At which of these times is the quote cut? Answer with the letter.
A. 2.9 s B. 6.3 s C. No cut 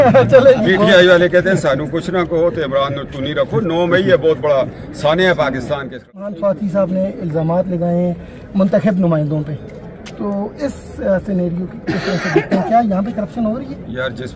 B